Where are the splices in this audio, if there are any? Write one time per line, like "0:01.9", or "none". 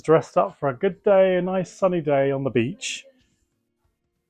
none

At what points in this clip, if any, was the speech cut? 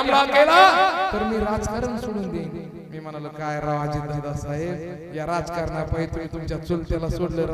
none

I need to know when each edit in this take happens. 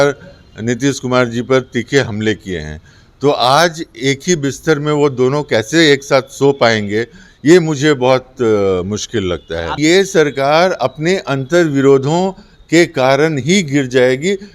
0:09.8

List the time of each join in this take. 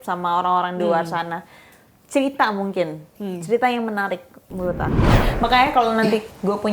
0:05.2

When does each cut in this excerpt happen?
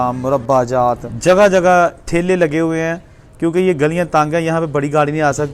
0:01.1

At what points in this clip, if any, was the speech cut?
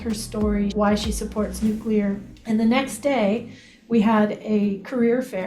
0:00.7
0:02.3

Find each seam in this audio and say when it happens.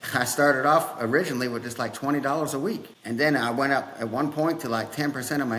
none

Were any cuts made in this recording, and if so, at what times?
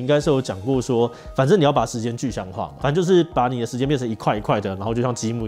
none

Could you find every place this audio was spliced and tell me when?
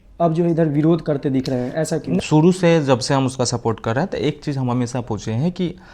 0:02.2

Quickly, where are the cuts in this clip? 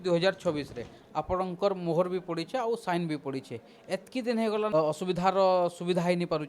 0:04.7

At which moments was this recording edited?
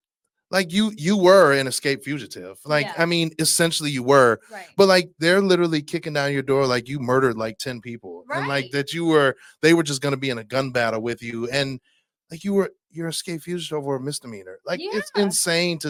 none

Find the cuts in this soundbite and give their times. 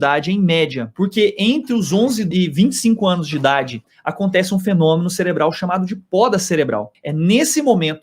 0:00.9
0:02.3
0:03.9
0:07.0

